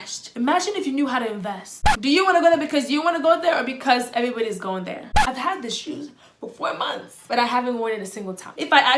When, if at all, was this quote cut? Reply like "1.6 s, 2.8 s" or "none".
1.9 s, 5.1 s